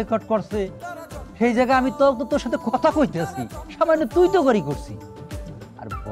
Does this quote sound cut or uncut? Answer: uncut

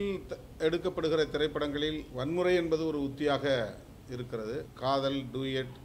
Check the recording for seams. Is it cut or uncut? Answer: cut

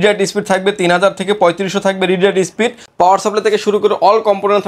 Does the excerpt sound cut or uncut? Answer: cut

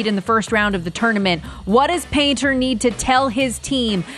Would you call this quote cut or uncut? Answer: uncut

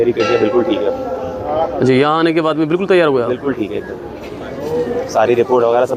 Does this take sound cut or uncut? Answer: uncut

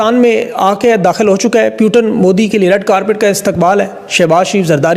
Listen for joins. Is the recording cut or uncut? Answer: uncut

